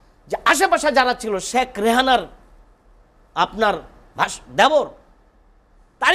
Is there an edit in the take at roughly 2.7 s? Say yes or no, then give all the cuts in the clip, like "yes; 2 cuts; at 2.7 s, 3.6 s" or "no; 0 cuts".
no; 0 cuts